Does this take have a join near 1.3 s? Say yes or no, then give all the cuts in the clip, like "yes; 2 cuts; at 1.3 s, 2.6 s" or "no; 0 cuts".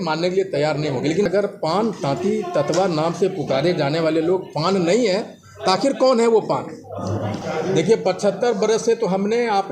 yes; 2 cuts; at 1.3 s, 7.4 s